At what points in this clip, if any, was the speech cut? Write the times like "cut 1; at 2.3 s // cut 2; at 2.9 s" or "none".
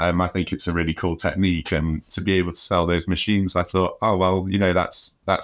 none